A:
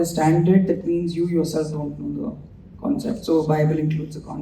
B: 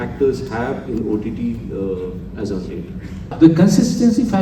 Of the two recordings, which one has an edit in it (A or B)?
B